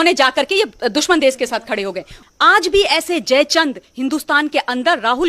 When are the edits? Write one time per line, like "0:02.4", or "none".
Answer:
0:02.2